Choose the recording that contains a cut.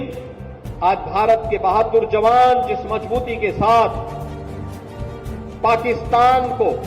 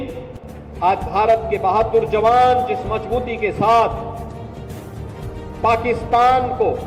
first; 2 cuts; at 4.2 s, 5.6 s

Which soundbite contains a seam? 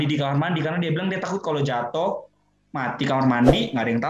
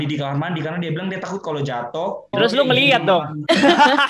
second; 1 cut; at 2.3 s

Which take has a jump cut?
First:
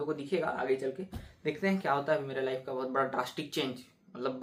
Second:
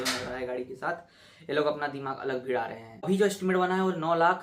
second; 1 cut; at 3.0 s

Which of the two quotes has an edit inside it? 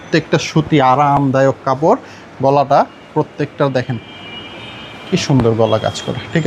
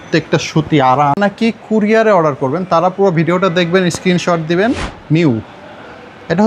second; 2 cuts; at 1.2 s, 4.9 s

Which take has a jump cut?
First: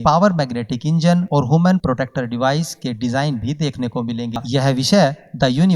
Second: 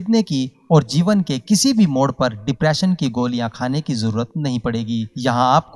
first; 1 cut; at 4.4 s

